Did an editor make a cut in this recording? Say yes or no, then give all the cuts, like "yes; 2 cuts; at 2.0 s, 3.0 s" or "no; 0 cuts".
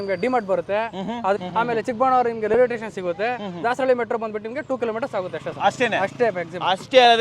yes; 1 cut; at 1.4 s